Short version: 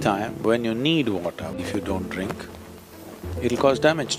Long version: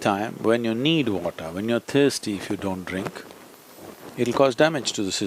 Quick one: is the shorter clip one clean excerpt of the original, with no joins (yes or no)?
no